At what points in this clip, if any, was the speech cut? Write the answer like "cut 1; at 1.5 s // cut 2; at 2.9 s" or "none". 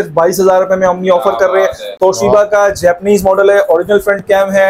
none